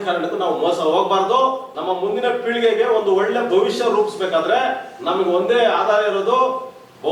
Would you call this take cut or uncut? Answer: cut